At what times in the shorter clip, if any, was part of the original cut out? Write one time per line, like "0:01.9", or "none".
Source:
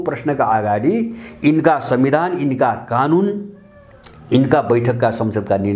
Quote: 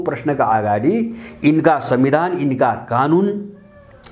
none